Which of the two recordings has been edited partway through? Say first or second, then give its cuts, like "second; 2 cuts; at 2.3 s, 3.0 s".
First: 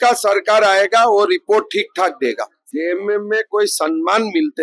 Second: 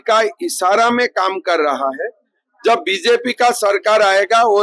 first; 1 cut; at 2.6 s